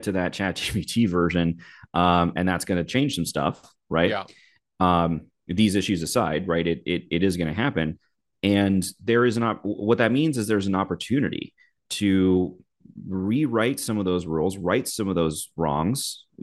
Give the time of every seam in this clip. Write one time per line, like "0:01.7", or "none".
none